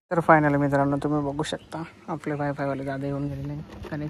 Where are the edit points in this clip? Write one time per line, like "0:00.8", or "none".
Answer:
none